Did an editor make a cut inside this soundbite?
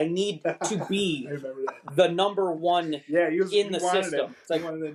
no; 0 cuts

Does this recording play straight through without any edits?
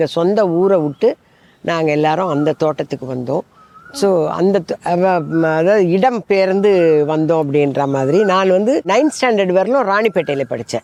yes; 0 cuts

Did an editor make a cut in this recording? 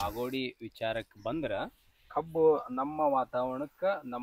no; 0 cuts

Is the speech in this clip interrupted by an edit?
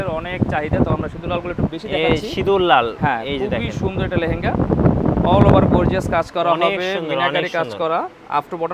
no; 0 cuts

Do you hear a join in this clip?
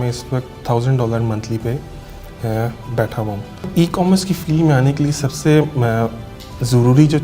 yes; 1 cut; at 3.7 s

